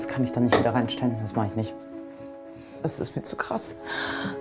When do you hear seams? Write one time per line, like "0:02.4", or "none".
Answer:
none